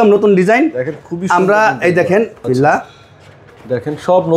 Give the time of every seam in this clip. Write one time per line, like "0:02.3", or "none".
0:02.4